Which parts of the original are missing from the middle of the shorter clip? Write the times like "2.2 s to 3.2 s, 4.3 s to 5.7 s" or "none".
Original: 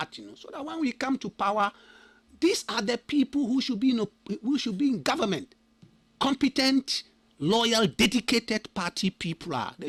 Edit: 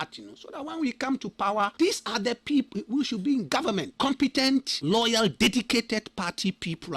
1.7 s to 2.3 s, 3.3 s to 4.2 s, 5.4 s to 6.1 s, 6.9 s to 7.3 s